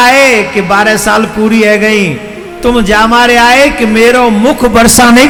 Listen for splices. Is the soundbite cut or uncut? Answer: uncut